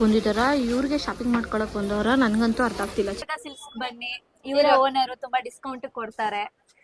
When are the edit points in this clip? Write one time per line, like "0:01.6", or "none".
0:03.2